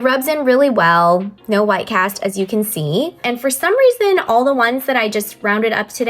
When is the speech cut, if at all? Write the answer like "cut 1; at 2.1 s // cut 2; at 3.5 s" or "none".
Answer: cut 1; at 3.2 s

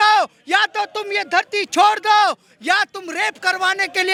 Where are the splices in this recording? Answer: none

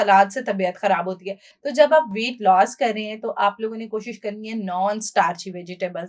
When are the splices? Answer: none

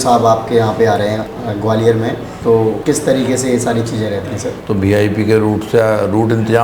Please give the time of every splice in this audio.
cut 1; at 1.3 s // cut 2; at 2.5 s // cut 3; at 4.6 s

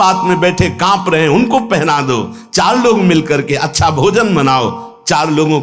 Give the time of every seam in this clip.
none

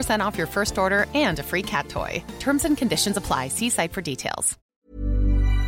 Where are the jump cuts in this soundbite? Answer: cut 1; at 4.6 s

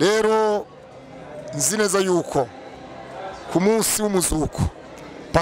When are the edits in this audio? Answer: none

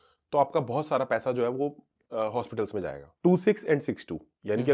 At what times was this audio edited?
cut 1; at 3.0 s

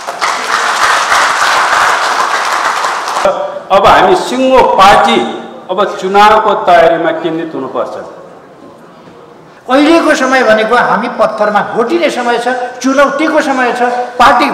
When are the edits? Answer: cut 1; at 3.3 s // cut 2; at 9.6 s

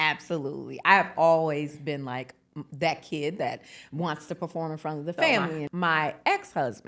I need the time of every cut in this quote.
cut 1; at 5.7 s

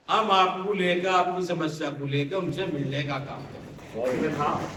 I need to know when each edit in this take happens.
none

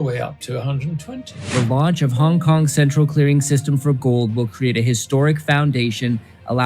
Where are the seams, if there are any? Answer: cut 1; at 1.4 s

